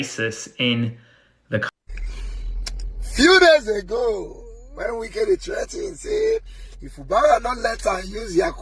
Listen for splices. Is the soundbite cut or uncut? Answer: cut